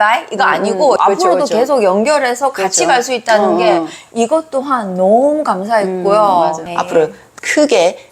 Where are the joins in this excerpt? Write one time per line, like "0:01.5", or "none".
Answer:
0:01.0
0:06.6

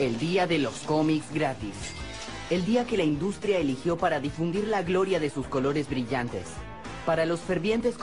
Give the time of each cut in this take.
0:02.3

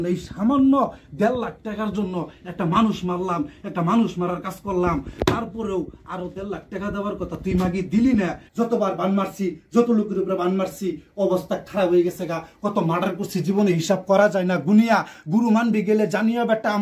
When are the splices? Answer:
0:08.4

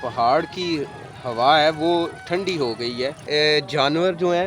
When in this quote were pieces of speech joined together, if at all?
0:03.2

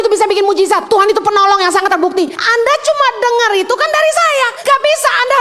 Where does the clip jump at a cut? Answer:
0:00.8
0:02.4
0:04.5

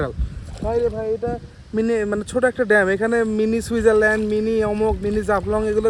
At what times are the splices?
none

